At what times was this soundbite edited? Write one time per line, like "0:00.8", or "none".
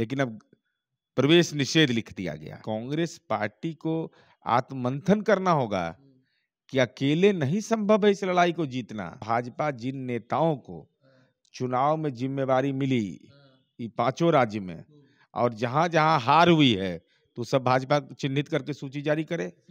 0:02.6
0:09.2

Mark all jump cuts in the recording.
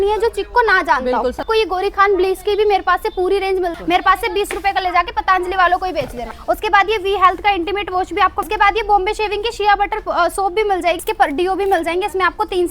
0:01.4
0:03.8
0:06.3
0:08.4
0:11.0

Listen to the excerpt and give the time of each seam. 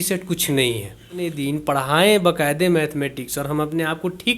0:01.4

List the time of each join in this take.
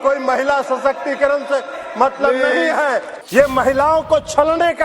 0:03.1

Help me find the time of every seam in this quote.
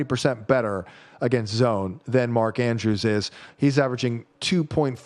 none

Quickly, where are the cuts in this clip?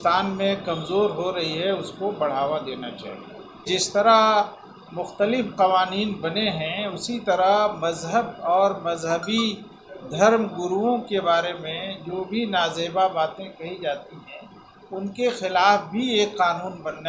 0:03.6

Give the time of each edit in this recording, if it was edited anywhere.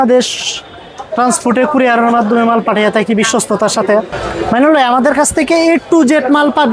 0:04.2

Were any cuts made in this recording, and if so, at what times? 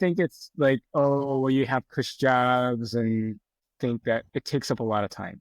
0:03.6

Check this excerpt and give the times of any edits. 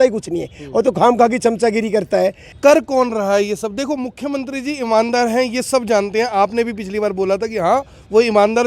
0:02.5

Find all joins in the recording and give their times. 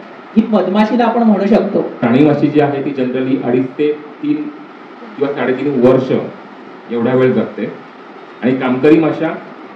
0:02.0

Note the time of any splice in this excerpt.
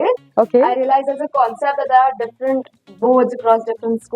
none

